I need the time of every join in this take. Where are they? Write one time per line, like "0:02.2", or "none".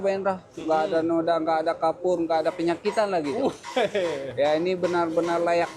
none